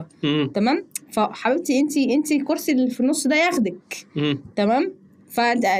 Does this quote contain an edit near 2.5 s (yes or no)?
no